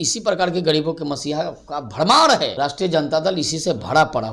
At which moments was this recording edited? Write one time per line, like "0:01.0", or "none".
0:02.5